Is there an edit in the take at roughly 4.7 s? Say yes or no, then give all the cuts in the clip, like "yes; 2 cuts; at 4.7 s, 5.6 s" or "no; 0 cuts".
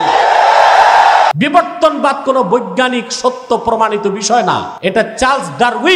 yes; 2 cuts; at 1.3 s, 4.7 s